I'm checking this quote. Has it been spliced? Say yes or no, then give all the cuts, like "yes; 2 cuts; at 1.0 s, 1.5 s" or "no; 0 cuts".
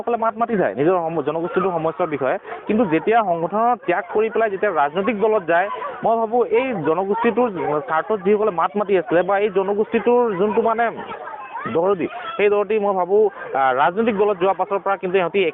no; 0 cuts